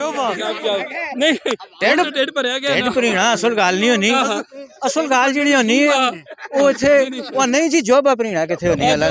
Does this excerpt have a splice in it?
no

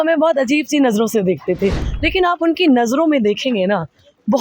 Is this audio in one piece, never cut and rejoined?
no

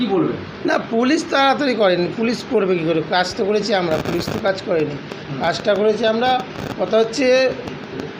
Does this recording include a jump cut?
no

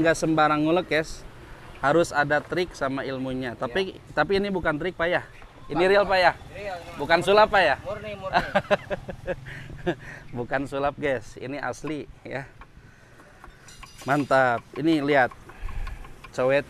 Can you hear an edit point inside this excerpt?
no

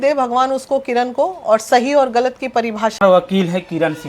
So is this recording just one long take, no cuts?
no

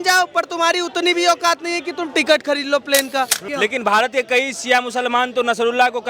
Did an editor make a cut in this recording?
yes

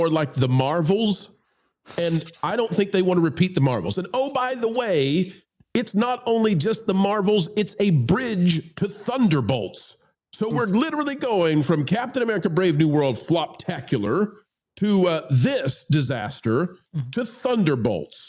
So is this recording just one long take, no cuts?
yes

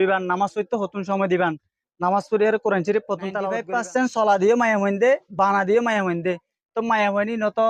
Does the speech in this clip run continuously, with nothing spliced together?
no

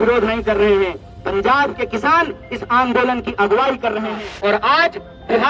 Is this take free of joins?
no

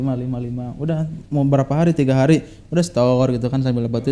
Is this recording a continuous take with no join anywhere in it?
yes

